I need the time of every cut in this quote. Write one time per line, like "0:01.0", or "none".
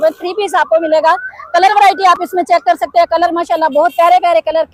none